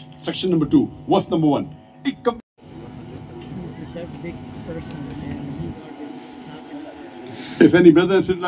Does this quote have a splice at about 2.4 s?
yes; 1 cut; at 2.4 s

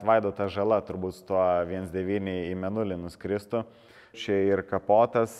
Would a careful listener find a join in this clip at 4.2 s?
yes; 1 cut; at 4.2 s

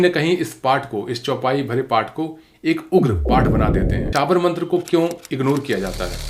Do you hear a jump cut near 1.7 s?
no; 1 cut; at 4.1 s

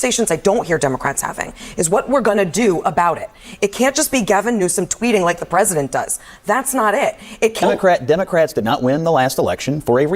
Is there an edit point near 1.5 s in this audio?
no; 1 cut; at 7.6 s

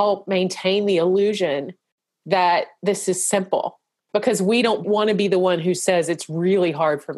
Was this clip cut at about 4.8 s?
yes; 2 cuts; at 4.0 s, 4.8 s

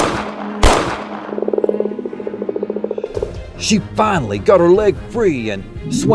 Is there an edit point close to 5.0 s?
no; 2 cuts; at 1.1 s, 3.0 s

